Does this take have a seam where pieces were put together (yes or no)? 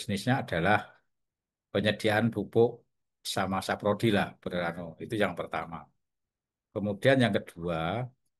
no